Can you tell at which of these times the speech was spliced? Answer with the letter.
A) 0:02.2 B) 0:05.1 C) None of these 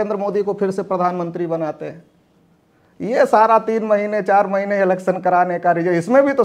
C